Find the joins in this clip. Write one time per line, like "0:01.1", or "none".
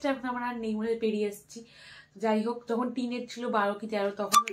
none